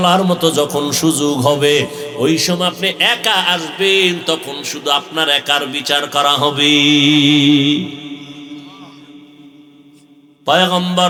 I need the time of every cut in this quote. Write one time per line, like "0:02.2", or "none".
none